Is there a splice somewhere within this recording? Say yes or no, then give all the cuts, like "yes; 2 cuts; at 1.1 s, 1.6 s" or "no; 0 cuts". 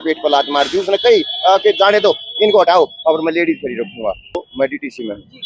yes; 1 cut; at 4.4 s